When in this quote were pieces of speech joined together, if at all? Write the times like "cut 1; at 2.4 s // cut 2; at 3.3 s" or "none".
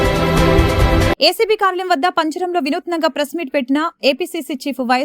cut 1; at 1.1 s